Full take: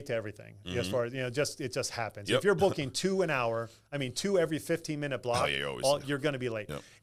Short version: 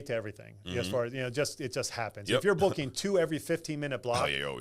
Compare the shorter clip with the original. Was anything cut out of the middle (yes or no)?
yes